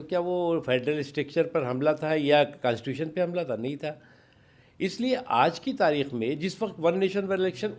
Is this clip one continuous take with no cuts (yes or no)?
yes